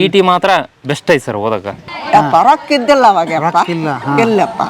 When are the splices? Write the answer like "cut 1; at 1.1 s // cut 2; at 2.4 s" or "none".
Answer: cut 1; at 1.9 s